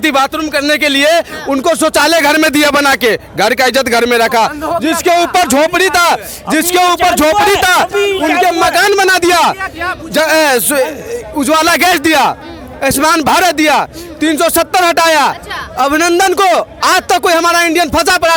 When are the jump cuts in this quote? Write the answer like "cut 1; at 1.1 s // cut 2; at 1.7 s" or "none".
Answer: none